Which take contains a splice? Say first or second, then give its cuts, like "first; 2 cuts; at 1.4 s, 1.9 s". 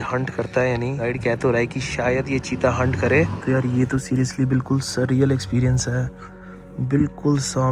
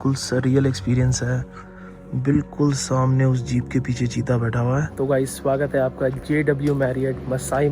second; 1 cut; at 4.9 s